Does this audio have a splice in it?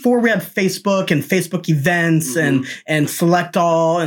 no; 0 cuts

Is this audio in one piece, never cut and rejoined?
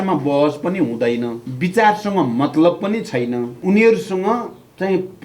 no; 2 cuts; at 1.4 s, 3.5 s

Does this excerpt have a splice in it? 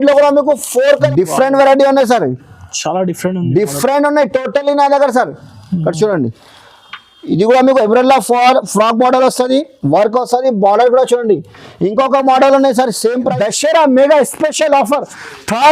yes; 2 cuts; at 1.0 s, 13.3 s

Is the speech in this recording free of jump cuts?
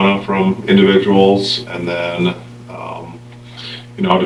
yes; 0 cuts

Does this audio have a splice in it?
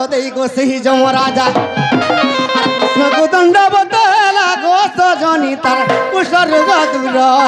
no; 0 cuts

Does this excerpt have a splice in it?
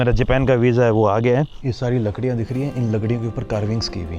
yes; 1 cut; at 1.6 s

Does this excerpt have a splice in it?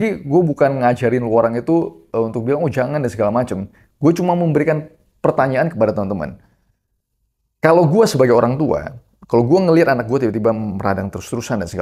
no; 0 cuts

